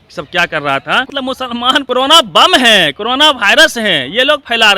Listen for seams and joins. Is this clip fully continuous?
no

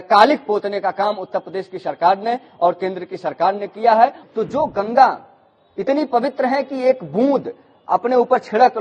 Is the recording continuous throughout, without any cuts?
no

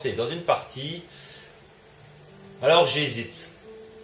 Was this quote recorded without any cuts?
no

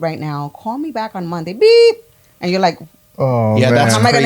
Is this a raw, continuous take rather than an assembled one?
yes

